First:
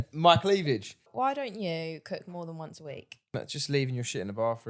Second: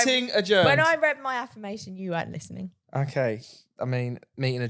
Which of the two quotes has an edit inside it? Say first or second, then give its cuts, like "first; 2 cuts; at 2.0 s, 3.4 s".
first; 2 cuts; at 1.1 s, 3.3 s